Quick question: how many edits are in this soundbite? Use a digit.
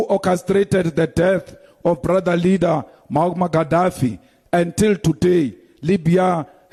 0